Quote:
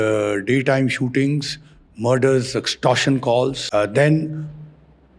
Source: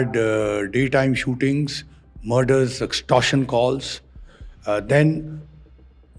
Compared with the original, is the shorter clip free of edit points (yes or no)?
no